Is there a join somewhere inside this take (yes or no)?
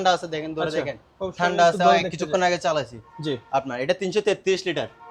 no